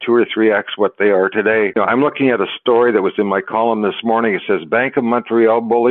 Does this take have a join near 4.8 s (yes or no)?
no